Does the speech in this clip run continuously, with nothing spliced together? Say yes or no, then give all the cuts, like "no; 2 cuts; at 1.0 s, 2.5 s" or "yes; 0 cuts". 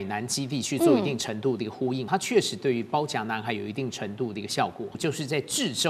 no; 2 cuts; at 2.0 s, 4.9 s